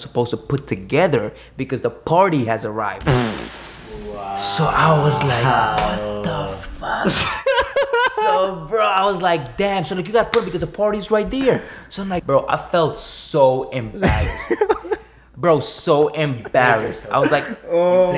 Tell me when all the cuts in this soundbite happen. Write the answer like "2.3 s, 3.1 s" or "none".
12.2 s